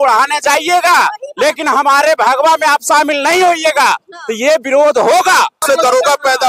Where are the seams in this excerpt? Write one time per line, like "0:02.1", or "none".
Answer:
0:05.6